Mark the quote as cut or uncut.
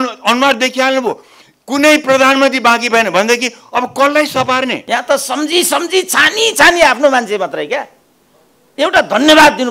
cut